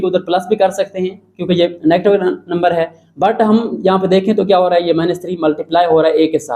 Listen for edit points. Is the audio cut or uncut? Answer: uncut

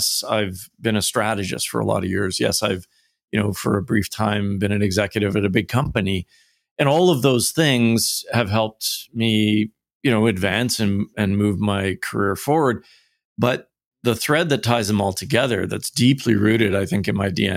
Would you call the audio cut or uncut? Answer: uncut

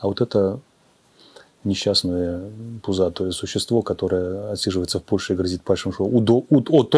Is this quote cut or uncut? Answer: uncut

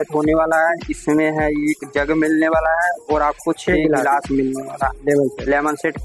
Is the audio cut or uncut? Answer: uncut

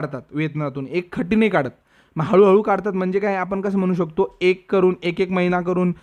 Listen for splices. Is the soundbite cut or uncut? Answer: uncut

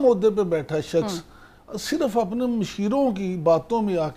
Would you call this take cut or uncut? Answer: uncut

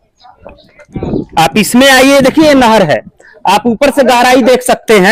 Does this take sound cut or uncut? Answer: uncut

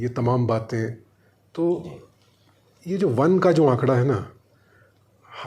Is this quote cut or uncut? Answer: uncut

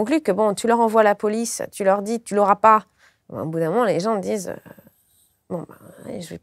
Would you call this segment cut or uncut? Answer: uncut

